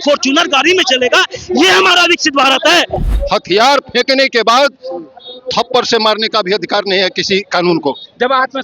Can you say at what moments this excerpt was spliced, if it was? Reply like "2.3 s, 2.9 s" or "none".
3.1 s